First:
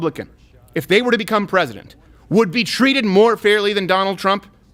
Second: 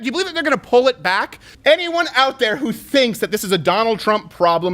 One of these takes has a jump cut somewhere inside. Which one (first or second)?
second